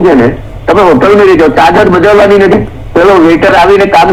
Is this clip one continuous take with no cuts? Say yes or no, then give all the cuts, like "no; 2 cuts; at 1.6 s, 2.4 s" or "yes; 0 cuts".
yes; 0 cuts